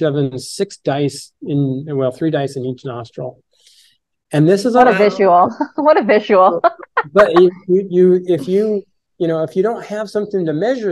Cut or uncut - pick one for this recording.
uncut